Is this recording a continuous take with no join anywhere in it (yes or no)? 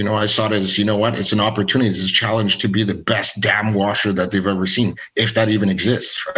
yes